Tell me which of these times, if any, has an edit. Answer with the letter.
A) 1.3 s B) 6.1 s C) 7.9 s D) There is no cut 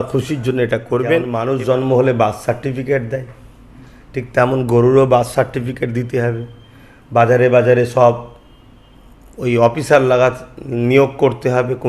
A